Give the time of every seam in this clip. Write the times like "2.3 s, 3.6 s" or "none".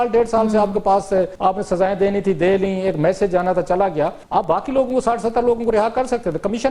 1.3 s, 4.2 s